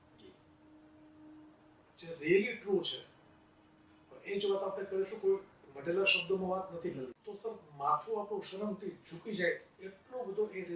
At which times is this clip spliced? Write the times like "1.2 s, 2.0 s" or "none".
7.1 s